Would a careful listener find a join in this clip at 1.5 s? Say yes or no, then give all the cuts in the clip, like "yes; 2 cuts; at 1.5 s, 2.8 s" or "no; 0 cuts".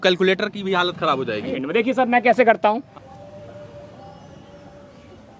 yes; 2 cuts; at 1.5 s, 2.9 s